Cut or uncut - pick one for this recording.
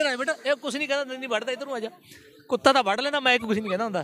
uncut